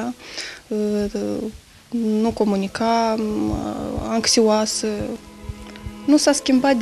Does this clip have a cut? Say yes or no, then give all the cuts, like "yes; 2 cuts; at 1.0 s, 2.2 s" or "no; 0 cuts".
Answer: no; 0 cuts